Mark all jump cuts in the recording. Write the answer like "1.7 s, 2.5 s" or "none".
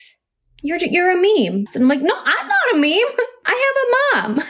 1.7 s, 3.4 s